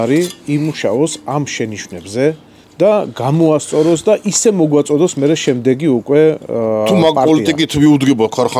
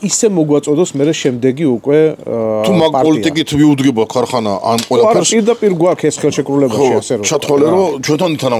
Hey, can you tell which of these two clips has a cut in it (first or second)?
first